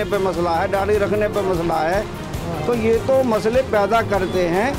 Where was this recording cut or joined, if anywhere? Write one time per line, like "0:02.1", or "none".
none